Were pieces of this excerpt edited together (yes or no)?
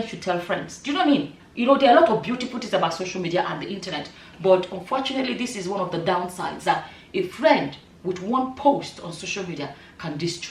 yes